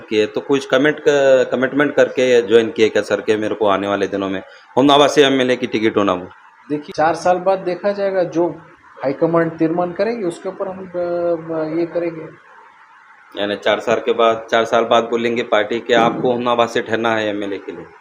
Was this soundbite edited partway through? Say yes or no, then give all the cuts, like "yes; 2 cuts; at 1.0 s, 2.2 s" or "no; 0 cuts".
yes; 1 cut; at 6.8 s